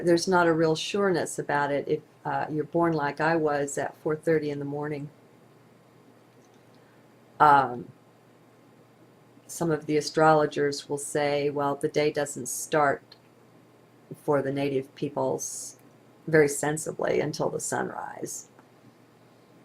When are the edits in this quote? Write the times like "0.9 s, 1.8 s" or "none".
12.3 s